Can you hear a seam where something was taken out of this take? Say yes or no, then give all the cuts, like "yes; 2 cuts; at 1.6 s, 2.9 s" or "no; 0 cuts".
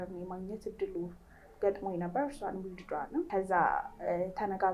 yes; 1 cut; at 3.3 s